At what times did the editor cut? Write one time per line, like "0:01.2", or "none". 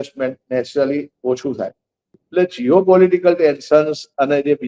0:02.0